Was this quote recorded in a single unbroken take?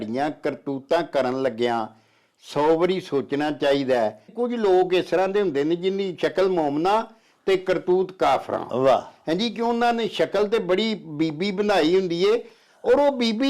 no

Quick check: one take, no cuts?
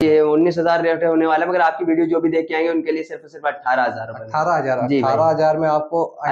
yes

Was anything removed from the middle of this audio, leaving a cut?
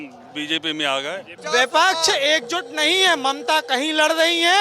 yes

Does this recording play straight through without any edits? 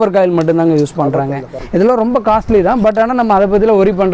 no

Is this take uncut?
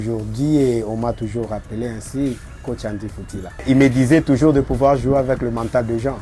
no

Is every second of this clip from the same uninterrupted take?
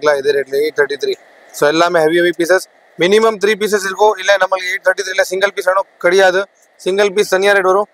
yes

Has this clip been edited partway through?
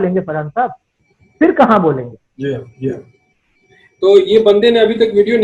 no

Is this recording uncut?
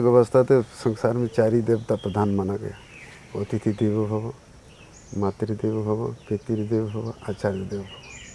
yes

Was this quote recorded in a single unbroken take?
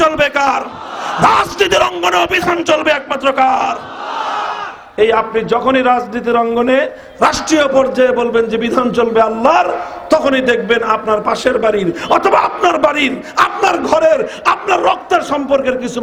yes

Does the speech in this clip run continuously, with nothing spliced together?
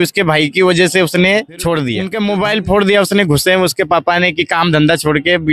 no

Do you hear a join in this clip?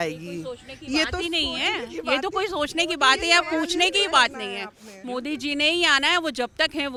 no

